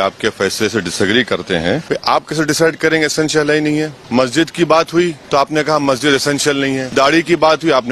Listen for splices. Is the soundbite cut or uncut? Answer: cut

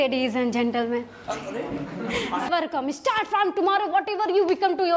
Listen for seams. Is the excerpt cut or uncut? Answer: cut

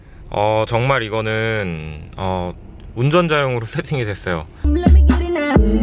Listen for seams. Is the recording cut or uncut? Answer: cut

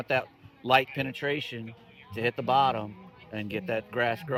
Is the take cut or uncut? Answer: uncut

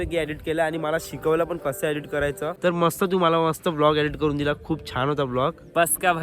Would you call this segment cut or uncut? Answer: cut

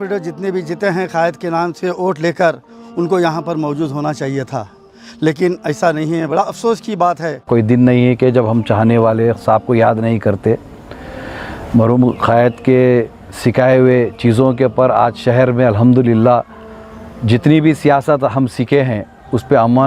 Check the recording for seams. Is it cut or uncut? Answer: cut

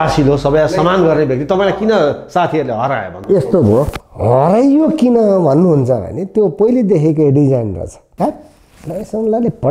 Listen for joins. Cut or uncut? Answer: cut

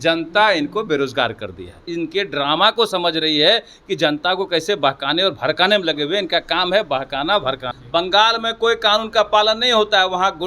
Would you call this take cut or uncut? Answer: cut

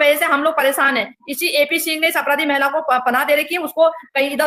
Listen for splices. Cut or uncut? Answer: uncut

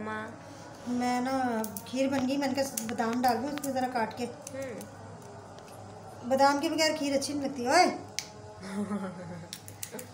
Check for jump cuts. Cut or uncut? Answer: uncut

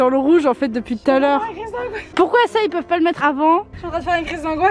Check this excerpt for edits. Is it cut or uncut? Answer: cut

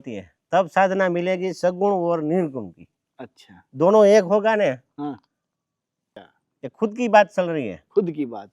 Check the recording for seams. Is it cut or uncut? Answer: cut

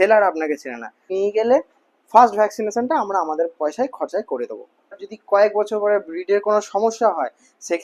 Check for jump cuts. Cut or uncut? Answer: cut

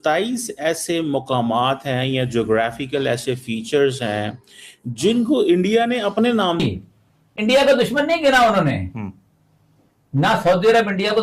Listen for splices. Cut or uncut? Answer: cut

